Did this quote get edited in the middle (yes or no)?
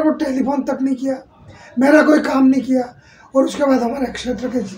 no